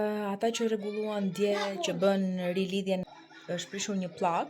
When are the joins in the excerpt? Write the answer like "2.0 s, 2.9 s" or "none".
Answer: 3.0 s